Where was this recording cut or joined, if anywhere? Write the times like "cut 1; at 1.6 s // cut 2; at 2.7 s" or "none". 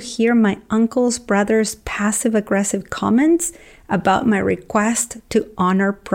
none